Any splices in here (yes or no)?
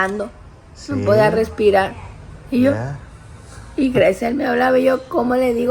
no